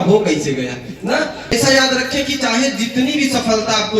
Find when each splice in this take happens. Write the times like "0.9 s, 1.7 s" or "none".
1.5 s